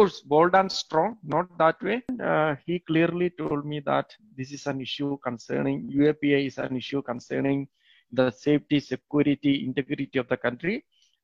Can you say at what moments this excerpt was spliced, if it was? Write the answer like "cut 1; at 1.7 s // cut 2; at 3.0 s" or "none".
cut 1; at 2.1 s